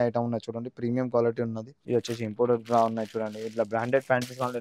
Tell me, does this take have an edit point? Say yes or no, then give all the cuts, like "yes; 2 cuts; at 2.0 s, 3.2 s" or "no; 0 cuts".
yes; 1 cut; at 1.7 s